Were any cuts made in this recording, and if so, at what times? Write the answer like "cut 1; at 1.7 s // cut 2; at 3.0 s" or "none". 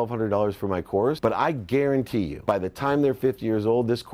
cut 1; at 1.2 s // cut 2; at 2.4 s